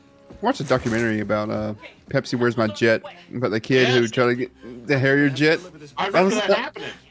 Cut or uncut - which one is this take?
uncut